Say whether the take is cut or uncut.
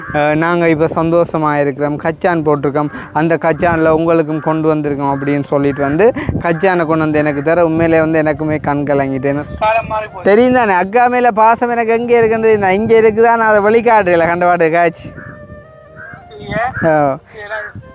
cut